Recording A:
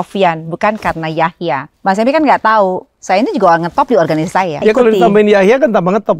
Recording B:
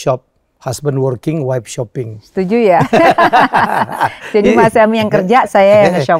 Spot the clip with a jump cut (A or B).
A